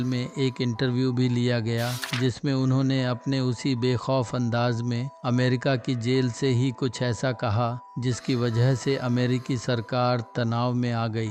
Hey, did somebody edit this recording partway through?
no; 0 cuts

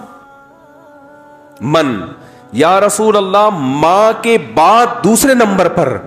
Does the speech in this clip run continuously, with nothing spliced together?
yes; 0 cuts

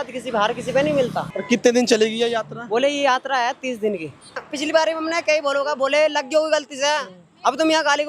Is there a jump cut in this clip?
yes; 2 cuts; at 1.3 s, 4.4 s

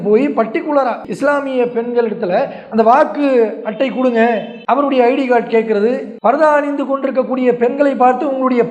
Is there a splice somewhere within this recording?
yes; 1 cut; at 1.1 s

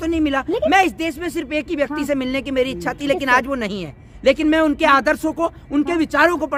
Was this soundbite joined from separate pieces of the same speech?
no; 0 cuts

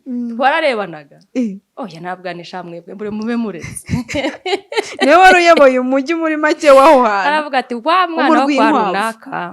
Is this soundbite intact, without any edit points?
yes; 0 cuts

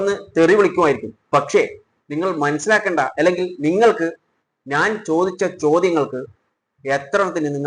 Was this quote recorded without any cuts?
yes; 0 cuts

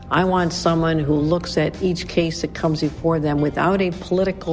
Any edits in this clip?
no; 0 cuts

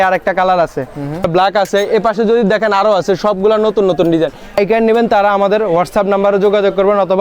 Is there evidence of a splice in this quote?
yes; 2 cuts; at 1.3 s, 4.6 s

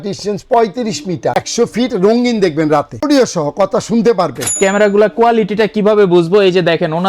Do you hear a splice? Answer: yes; 3 cuts; at 1.3 s, 2.9 s, 4.6 s

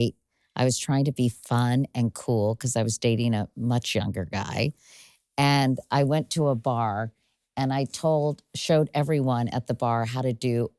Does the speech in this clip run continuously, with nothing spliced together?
yes; 0 cuts

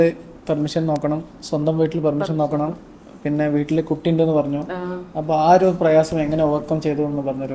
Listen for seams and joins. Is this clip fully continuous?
yes; 0 cuts

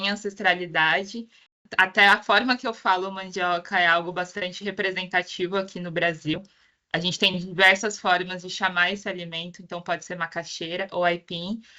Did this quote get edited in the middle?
yes; 1 cut; at 1.6 s

